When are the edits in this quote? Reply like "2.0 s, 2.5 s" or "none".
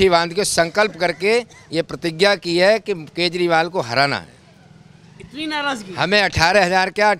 none